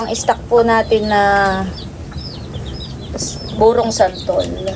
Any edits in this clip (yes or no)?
no